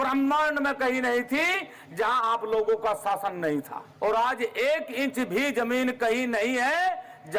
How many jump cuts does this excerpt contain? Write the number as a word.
one